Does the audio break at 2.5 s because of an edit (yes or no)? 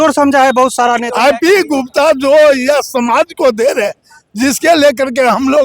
no